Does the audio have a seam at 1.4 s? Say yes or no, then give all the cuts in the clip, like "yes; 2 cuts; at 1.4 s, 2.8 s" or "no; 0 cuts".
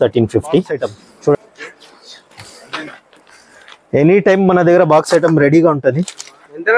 yes; 1 cut; at 1.4 s